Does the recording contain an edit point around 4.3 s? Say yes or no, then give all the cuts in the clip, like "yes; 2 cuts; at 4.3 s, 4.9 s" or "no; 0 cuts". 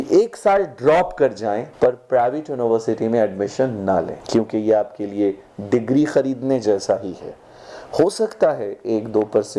no; 0 cuts